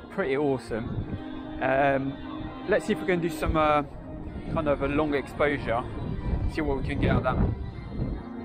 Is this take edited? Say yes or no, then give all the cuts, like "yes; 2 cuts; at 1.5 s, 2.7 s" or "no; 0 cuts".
no; 0 cuts